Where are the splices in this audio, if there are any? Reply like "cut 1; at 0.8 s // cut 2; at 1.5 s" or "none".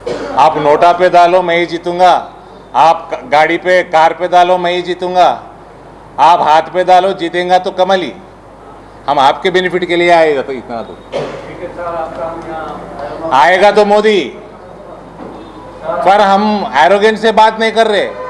none

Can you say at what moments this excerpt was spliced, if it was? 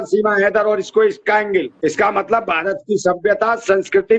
cut 1; at 1.7 s

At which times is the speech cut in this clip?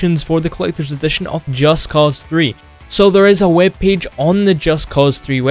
none

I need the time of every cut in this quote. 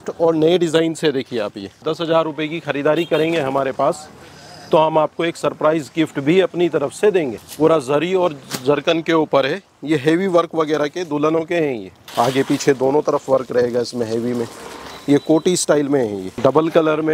cut 1; at 1.8 s // cut 2; at 7.4 s // cut 3; at 12.0 s // cut 4; at 16.3 s

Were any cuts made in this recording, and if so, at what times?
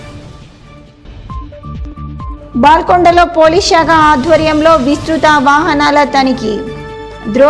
cut 1; at 2.3 s

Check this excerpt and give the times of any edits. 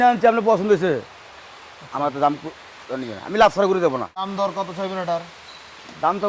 cut 1; at 4.3 s

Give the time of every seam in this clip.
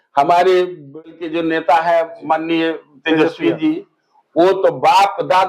cut 1; at 1.1 s

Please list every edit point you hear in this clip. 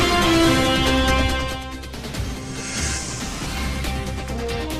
none

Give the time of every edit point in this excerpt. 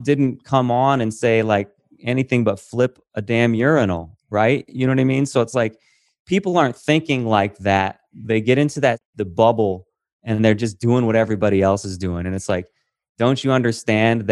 cut 1; at 3.1 s // cut 2; at 9.1 s

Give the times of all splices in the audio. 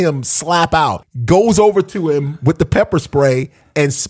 cut 1; at 1.1 s

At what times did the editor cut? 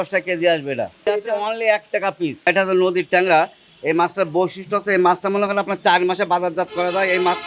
cut 1; at 1.0 s // cut 2; at 2.5 s

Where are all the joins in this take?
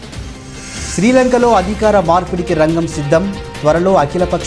cut 1; at 0.9 s

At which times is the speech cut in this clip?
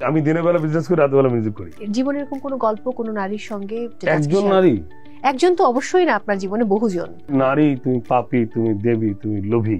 cut 1; at 1.7 s // cut 2; at 3.9 s // cut 3; at 7.3 s

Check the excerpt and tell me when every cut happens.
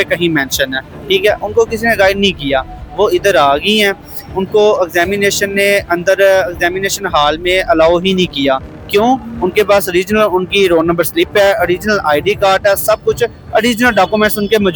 none

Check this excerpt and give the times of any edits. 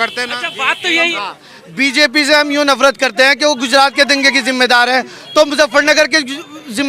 cut 1; at 1.1 s

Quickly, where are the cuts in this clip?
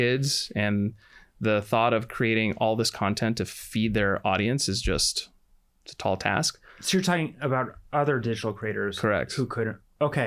none

